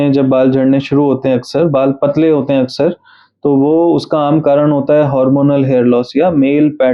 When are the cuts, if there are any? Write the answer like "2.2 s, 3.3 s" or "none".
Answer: none